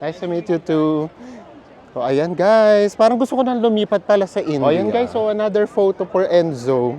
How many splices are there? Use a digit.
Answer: 1